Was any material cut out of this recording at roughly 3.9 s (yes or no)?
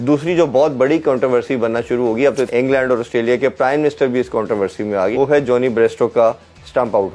no